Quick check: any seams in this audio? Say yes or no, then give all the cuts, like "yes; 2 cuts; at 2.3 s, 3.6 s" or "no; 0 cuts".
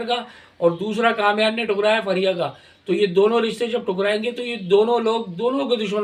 no; 0 cuts